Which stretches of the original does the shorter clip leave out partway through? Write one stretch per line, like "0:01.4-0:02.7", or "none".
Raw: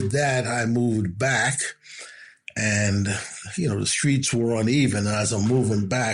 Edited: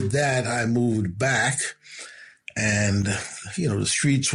none